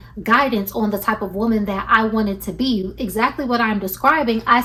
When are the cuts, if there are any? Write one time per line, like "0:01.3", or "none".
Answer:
none